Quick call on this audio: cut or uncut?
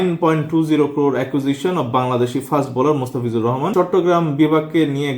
cut